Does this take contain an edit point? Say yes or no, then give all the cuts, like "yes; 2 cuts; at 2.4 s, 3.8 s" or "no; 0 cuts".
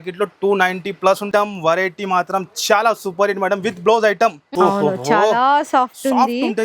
yes; 2 cuts; at 1.3 s, 4.4 s